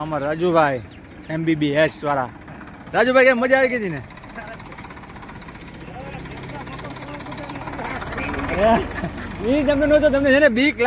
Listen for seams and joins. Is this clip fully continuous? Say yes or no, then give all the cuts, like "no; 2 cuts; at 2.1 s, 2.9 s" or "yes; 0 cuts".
yes; 0 cuts